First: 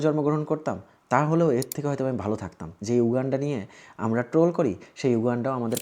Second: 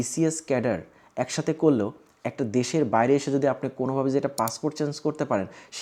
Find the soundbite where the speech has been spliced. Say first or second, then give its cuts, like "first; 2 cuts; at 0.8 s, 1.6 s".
first; 1 cut; at 2.7 s